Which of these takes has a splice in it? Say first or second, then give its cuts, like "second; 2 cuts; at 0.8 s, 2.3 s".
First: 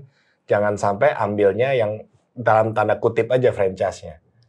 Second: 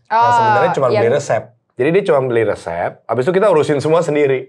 second; 1 cut; at 1.6 s